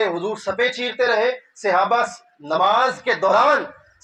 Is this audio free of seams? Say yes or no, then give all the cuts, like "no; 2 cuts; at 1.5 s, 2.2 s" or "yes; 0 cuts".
yes; 0 cuts